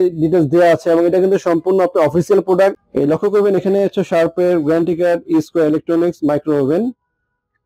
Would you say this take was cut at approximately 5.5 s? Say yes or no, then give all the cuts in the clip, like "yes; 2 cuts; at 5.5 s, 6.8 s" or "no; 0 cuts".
no; 1 cut; at 2.8 s